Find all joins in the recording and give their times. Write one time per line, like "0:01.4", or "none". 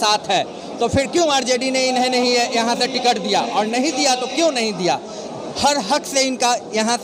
none